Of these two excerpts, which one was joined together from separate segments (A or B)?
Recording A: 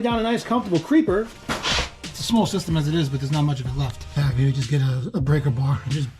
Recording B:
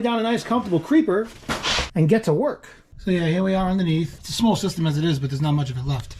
A